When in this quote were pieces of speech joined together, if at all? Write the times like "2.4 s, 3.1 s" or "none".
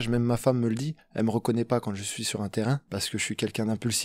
1.0 s, 2.8 s